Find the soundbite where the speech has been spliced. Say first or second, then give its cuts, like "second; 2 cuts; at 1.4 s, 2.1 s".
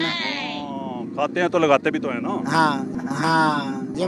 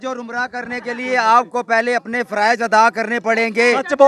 first; 1 cut; at 2.9 s